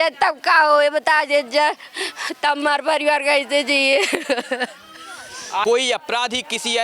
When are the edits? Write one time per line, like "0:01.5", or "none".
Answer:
0:05.6